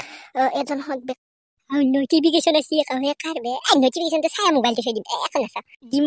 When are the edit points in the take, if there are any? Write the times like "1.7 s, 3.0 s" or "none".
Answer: 1.2 s